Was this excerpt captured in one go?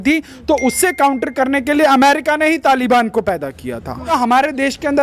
no; 1 cut; at 4.1 s

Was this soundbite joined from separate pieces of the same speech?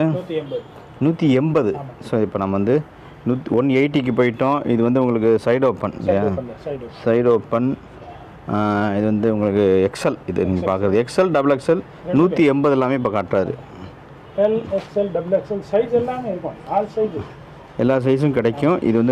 no; 0 cuts

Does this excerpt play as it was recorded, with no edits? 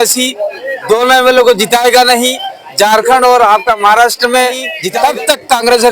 no; 1 cut; at 4.8 s

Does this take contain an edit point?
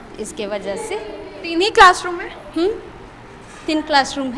no; 0 cuts

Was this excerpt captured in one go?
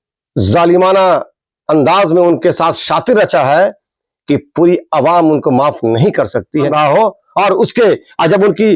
no; 1 cut; at 6.7 s

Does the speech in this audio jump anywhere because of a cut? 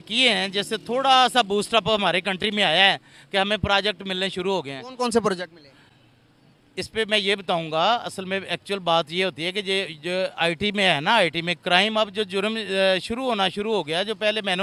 no; 0 cuts

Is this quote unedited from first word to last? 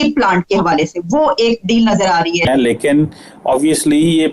no; 1 cut; at 2.5 s

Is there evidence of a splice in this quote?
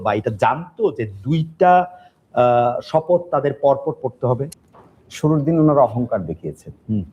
yes; 1 cut; at 4.5 s

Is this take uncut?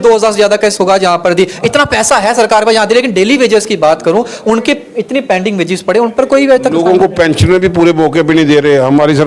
yes; 0 cuts

